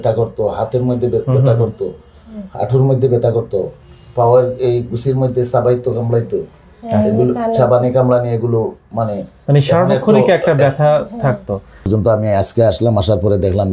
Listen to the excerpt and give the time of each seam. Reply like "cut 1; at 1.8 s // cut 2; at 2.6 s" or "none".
cut 1; at 11.8 s

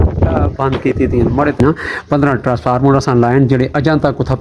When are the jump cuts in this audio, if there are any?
cut 1; at 1.6 s

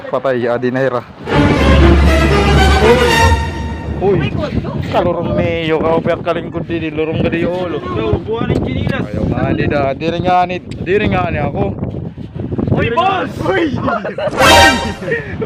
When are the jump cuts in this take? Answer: none

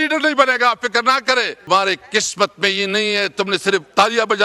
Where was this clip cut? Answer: cut 1; at 1.7 s

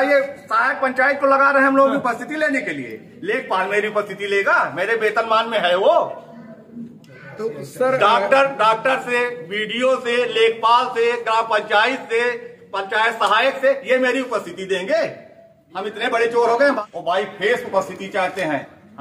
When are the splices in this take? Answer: cut 1; at 16.8 s

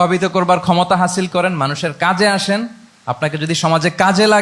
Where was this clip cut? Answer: none

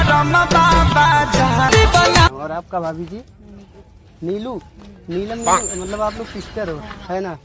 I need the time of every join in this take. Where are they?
cut 1; at 1.7 s

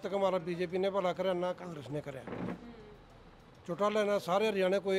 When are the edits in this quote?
none

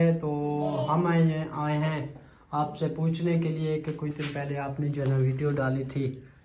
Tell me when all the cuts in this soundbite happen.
none

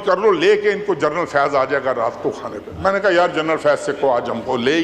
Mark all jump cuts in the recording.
none

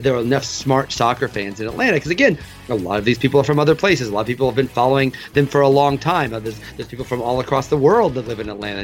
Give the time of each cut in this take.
none

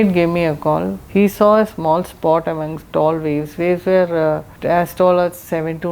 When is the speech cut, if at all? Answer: cut 1; at 1.0 s // cut 2; at 4.5 s

